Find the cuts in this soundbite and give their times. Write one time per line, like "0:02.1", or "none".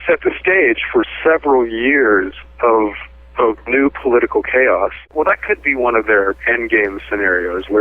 0:05.1